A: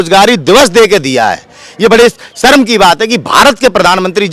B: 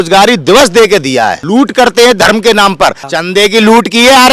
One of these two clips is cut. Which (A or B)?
B